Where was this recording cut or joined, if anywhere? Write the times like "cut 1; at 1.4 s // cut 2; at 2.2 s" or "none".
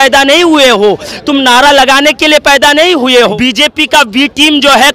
cut 1; at 3.3 s